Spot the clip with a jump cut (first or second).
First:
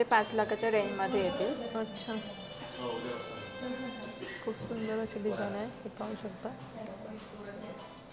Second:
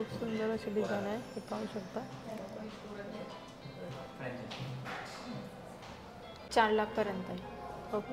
second